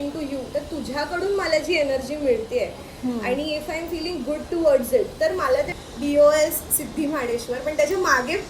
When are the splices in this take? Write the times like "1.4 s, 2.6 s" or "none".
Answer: 5.7 s